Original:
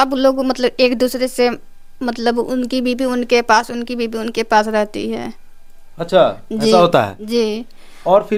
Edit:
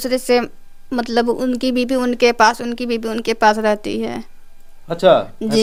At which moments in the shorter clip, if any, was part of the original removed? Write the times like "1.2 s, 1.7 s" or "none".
none